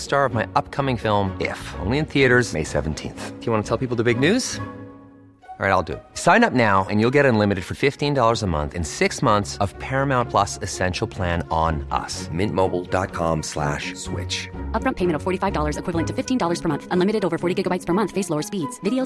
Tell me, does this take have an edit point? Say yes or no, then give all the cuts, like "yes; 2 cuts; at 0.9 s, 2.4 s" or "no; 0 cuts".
no; 0 cuts